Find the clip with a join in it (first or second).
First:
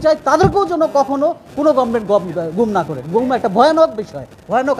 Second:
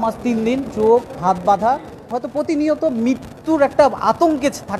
second